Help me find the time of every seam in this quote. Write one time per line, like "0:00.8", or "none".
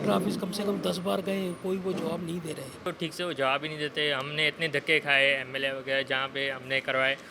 0:02.8